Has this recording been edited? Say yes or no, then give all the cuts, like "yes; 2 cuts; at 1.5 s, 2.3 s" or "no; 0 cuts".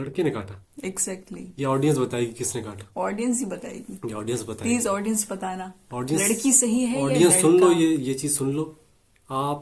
no; 0 cuts